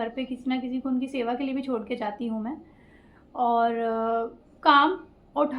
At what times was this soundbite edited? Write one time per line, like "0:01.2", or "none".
none